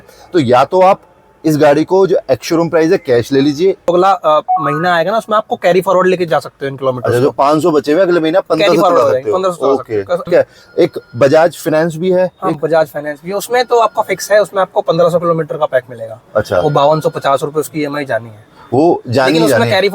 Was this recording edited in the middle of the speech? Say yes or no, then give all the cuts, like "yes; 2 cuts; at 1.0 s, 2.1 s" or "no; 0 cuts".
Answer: yes; 2 cuts; at 3.9 s, 10.2 s